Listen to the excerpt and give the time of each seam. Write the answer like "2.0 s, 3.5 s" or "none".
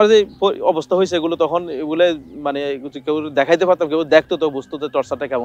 none

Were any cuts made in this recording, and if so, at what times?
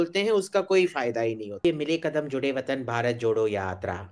1.6 s

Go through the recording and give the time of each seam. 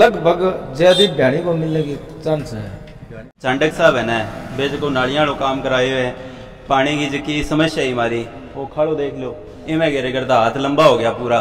3.4 s

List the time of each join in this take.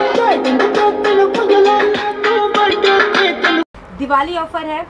3.7 s

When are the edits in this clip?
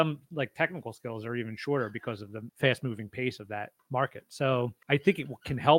2.4 s, 3.8 s, 4.8 s

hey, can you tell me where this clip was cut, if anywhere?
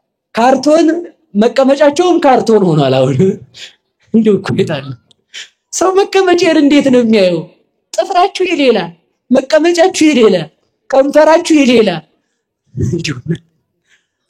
none

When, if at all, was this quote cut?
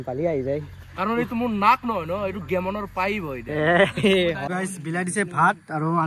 4.4 s

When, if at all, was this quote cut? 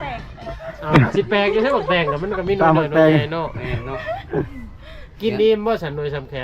none

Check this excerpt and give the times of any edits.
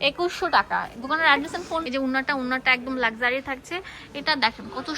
1.8 s

